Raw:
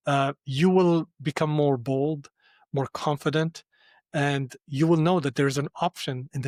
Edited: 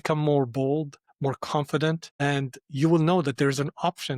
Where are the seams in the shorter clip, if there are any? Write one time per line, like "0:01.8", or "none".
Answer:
0:01.0
0:02.1